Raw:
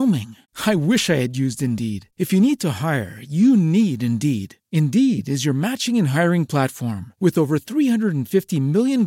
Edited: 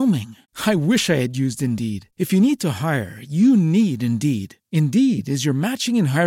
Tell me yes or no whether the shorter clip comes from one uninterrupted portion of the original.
yes